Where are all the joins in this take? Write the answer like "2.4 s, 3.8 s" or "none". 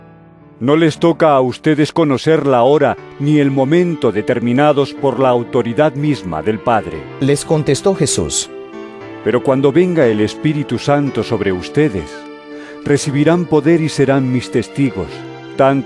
none

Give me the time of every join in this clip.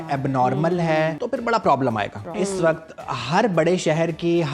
1.2 s, 2.3 s

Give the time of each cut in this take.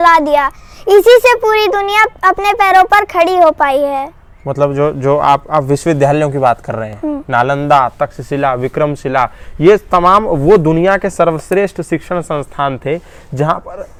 none

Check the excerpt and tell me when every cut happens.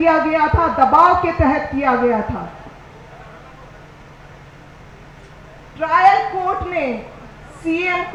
none

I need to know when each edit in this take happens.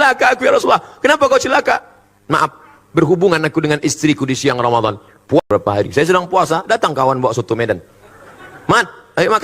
5.4 s

